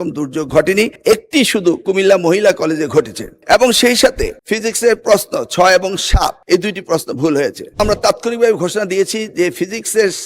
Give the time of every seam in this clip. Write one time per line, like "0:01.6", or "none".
0:07.8